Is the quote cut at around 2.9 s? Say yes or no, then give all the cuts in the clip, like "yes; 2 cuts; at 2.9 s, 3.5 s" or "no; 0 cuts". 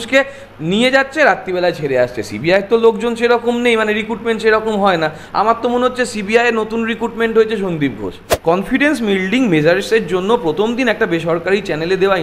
no; 1 cut; at 8.3 s